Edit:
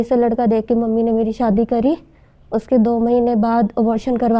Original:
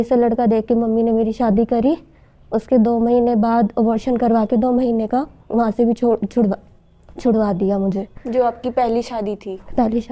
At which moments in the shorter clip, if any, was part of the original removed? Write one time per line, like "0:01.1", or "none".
none